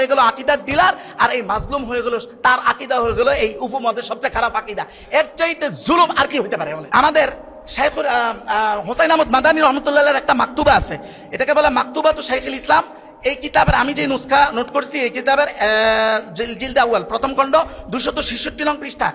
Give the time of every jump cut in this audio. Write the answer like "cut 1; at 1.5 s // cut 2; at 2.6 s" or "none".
cut 1; at 6.8 s